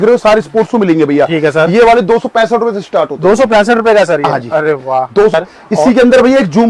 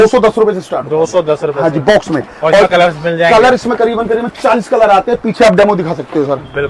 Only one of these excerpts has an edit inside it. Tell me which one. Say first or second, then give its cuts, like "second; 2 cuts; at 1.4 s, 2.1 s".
first; 1 cut; at 5.3 s